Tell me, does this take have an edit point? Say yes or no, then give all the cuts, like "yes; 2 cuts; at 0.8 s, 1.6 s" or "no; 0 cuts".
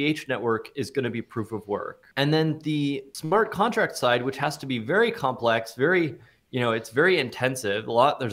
yes; 2 cuts; at 2.0 s, 3.1 s